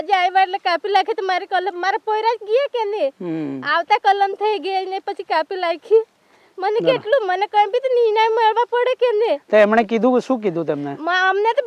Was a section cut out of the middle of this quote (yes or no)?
no